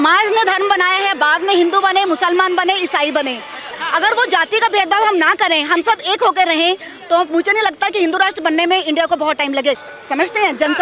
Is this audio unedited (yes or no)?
no